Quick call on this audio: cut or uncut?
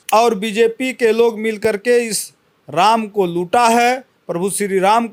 uncut